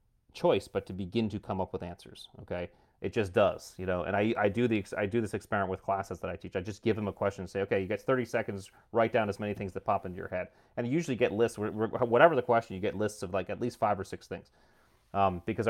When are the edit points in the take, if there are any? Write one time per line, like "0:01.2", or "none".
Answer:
none